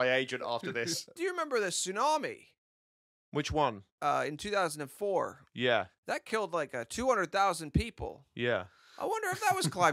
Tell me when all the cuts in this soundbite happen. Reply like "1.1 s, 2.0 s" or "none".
1.2 s